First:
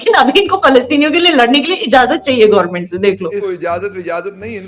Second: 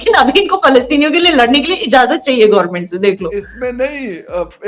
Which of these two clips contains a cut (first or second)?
first